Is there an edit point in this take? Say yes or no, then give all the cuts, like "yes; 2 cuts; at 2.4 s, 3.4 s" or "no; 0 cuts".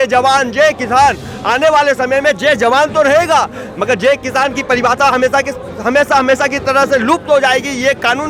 no; 0 cuts